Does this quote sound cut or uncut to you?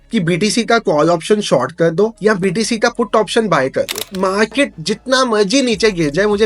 cut